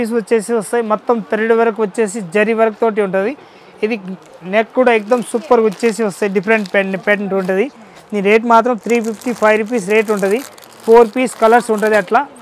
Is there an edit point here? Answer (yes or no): no